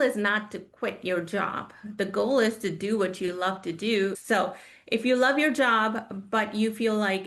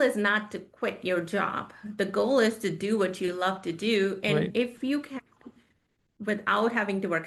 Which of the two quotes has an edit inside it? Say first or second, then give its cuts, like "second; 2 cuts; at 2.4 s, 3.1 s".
first; 1 cut; at 4.2 s